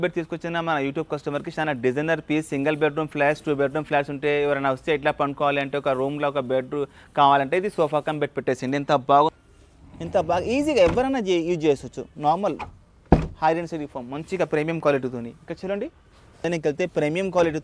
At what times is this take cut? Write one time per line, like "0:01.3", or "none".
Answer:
0:09.3
0:16.4